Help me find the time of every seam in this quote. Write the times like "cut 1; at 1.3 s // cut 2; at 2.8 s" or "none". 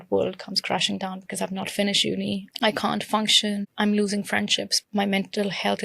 cut 1; at 2.5 s // cut 2; at 3.7 s // cut 3; at 4.7 s

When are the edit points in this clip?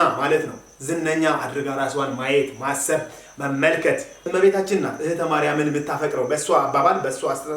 cut 1; at 4.1 s

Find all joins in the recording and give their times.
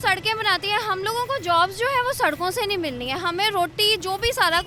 none

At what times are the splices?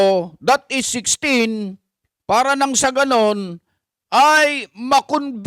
none

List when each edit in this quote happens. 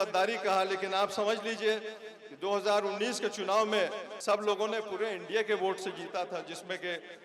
cut 1; at 4.1 s

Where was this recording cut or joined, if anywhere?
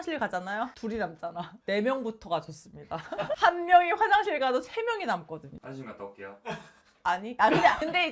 cut 1; at 3.4 s // cut 2; at 5.6 s

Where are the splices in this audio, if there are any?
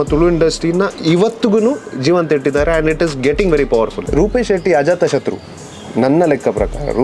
cut 1; at 4.0 s

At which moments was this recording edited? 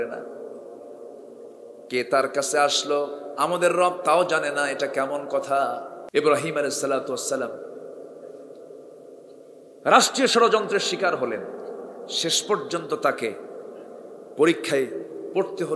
cut 1; at 5.9 s

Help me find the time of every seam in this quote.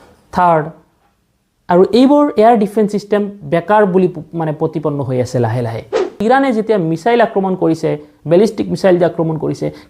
cut 1; at 6.2 s

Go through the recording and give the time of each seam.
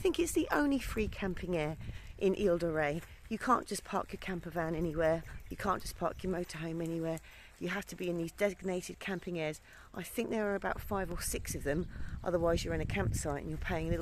none

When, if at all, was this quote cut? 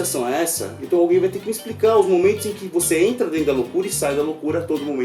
none

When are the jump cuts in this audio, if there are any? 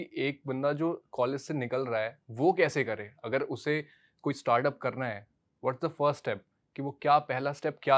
none

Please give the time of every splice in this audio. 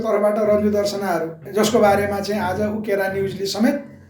cut 1; at 1.4 s

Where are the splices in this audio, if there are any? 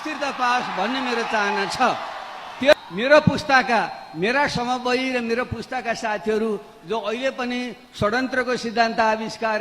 cut 1; at 2.7 s

